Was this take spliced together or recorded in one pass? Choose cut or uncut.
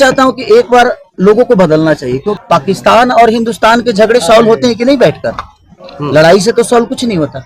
cut